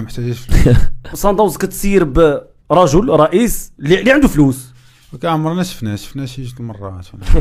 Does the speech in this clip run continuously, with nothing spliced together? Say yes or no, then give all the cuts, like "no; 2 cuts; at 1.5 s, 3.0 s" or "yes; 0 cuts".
no; 1 cut; at 1.1 s